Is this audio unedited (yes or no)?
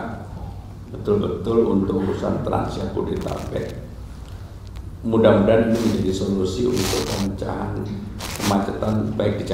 yes